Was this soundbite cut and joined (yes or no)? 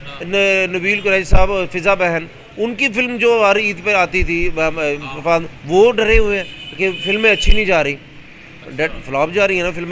no